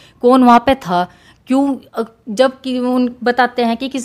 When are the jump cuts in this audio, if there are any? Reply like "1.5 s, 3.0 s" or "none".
none